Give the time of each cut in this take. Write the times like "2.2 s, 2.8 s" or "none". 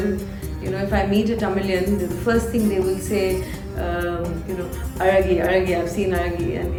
none